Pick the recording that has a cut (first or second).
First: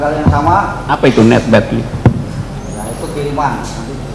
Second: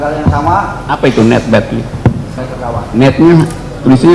second